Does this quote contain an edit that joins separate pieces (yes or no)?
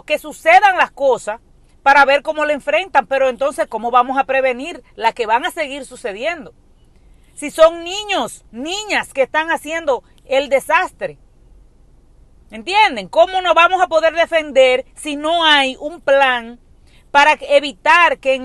no